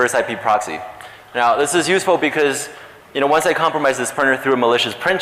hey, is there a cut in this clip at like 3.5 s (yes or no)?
no